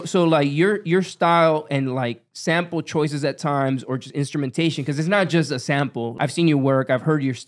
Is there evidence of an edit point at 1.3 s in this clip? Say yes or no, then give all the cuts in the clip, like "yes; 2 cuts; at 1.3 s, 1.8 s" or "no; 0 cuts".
no; 1 cut; at 6.1 s